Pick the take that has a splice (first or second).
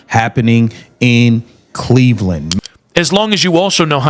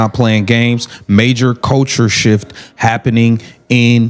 first